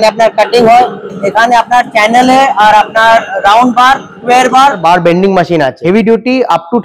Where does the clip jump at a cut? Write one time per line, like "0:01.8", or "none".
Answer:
0:04.8
0:05.8